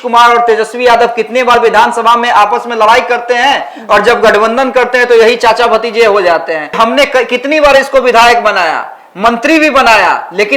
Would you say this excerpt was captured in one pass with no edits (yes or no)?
no